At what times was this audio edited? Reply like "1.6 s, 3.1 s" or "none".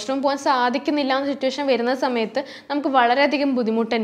none